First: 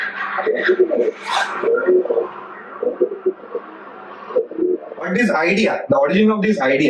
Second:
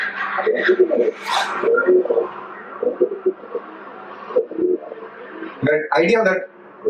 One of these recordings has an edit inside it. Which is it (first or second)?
first